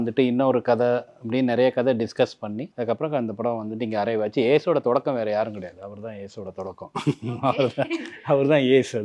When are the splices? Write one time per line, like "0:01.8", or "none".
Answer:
0:02.7